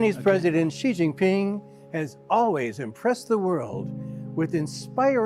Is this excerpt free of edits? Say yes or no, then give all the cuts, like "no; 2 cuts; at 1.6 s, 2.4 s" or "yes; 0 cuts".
no; 1 cut; at 4.2 s